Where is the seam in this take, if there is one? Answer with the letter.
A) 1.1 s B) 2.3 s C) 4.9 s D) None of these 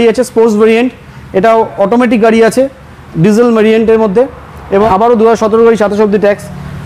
C